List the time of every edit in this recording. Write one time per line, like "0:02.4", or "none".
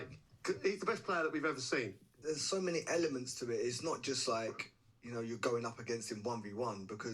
0:02.1